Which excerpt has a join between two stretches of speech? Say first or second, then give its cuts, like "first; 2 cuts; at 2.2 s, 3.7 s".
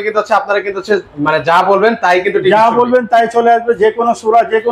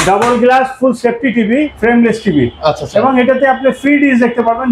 second; 1 cut; at 1.7 s